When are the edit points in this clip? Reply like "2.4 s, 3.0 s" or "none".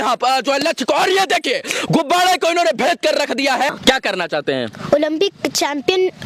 3.7 s

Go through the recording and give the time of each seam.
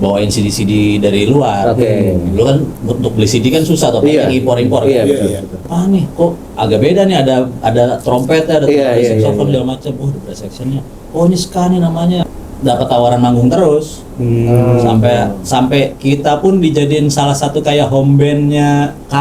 5.6 s, 12.3 s

